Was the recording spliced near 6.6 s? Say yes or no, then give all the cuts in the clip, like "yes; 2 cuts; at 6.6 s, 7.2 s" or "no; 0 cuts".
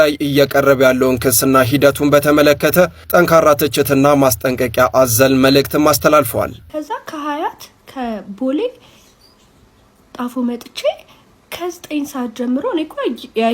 yes; 1 cut; at 6.6 s